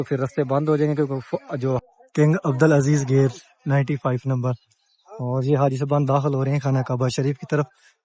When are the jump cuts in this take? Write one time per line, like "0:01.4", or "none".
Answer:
0:01.8